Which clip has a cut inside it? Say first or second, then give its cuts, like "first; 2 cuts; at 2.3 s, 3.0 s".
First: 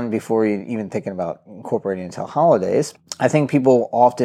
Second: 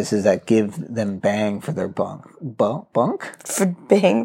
first; 1 cut; at 3.0 s